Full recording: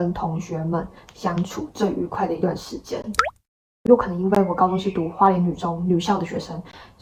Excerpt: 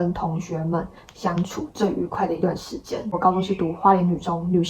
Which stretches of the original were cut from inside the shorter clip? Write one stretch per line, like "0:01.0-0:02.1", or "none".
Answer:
0:03.2-0:04.5